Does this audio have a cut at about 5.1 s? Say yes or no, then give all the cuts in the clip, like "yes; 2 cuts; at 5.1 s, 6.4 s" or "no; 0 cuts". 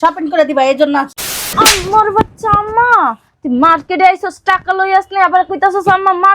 no; 1 cut; at 1.5 s